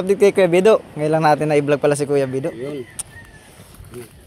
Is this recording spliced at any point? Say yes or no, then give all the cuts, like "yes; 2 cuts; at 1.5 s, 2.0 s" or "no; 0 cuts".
no; 0 cuts